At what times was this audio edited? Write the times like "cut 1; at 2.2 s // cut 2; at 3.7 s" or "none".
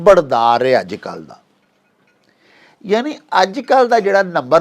none